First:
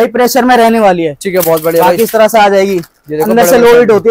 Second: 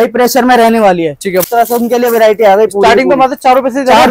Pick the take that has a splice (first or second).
second